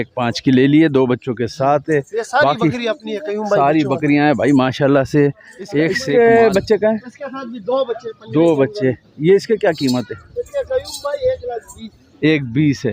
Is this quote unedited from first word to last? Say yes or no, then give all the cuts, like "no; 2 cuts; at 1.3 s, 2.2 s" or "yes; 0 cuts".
no; 1 cut; at 6.0 s